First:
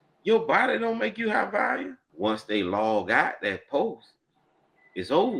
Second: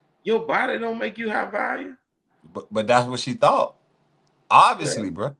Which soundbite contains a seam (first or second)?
first